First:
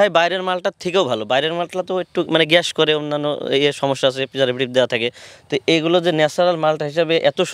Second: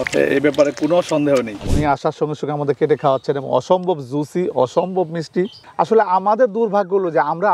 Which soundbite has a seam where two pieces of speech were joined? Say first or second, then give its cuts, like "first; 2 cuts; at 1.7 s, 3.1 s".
second; 2 cuts; at 1.6 s, 5.5 s